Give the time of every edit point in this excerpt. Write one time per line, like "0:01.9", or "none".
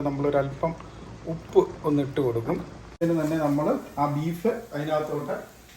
0:03.0